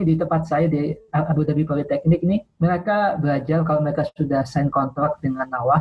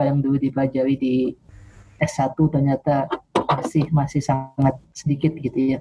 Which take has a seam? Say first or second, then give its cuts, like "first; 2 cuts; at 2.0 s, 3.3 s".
first; 1 cut; at 2.5 s